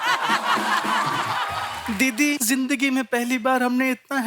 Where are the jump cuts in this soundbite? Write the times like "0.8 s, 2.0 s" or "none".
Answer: 1.5 s, 2.4 s